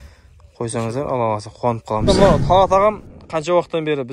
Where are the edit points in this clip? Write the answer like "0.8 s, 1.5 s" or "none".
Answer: 2.1 s